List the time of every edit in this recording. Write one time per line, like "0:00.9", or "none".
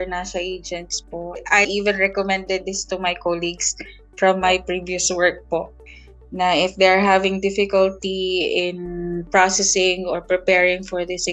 0:01.4